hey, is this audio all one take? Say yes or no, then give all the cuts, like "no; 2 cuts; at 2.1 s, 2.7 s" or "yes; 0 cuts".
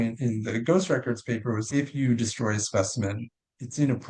no; 1 cut; at 1.7 s